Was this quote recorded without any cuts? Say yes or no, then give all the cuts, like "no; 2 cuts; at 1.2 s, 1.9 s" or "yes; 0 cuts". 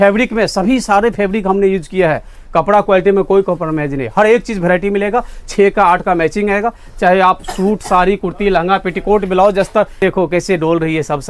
no; 1 cut; at 10.0 s